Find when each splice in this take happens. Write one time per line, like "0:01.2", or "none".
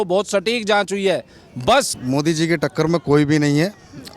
0:01.9